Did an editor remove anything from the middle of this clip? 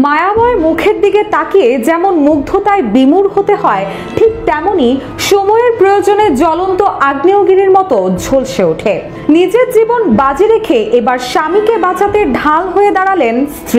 no; 0 cuts

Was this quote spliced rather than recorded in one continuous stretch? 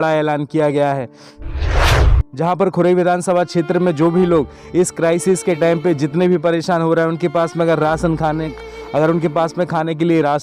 yes; 2 cuts; at 1.1 s, 2.3 s

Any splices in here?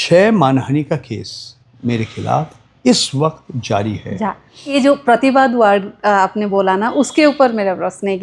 yes; 1 cut; at 4.7 s

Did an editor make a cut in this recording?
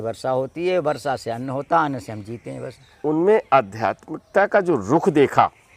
yes; 1 cut; at 2.9 s

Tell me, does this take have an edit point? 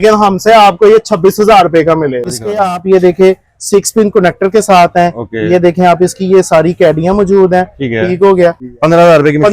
yes; 2 cuts; at 2.3 s, 8.7 s

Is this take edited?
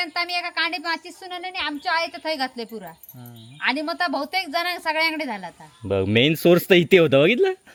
no; 0 cuts

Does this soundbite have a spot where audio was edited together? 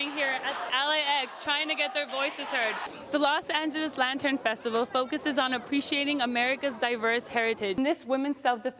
yes; 2 cuts; at 2.9 s, 7.8 s

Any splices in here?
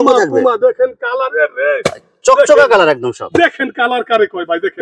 no; 0 cuts

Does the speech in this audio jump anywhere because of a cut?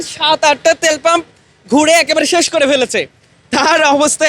no; 0 cuts

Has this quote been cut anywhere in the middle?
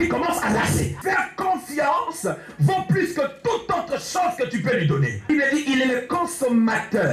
yes; 2 cuts; at 1.0 s, 5.2 s

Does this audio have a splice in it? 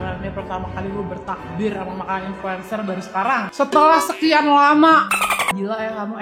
no; 0 cuts

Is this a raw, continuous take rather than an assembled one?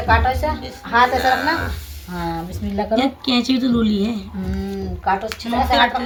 yes; 0 cuts

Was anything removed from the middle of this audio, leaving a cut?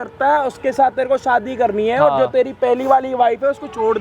no; 0 cuts

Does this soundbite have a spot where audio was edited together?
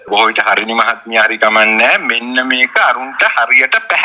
no; 0 cuts

